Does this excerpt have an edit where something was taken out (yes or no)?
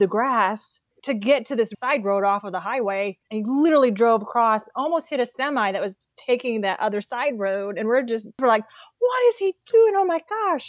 yes